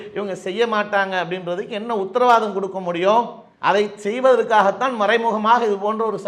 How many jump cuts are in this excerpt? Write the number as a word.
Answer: zero